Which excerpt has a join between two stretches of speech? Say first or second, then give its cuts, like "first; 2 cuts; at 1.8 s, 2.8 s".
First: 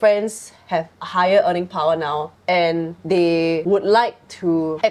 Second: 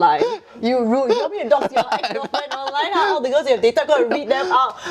first; 3 cuts; at 1.0 s, 2.3 s, 3.5 s